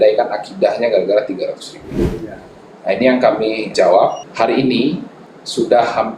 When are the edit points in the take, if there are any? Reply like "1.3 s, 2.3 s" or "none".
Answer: 4.2 s